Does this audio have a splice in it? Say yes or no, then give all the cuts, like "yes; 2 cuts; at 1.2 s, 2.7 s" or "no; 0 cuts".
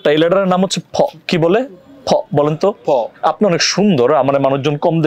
no; 0 cuts